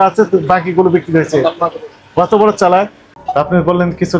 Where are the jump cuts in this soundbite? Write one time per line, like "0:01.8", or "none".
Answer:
0:03.1